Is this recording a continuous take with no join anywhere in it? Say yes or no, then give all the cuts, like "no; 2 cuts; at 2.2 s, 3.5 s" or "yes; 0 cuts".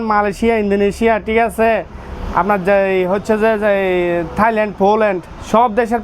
yes; 0 cuts